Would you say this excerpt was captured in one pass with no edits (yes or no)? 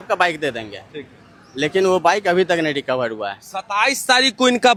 yes